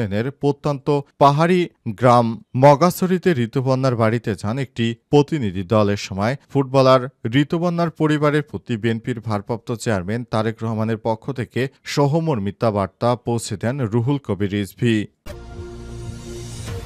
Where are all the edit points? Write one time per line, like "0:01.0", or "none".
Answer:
0:15.2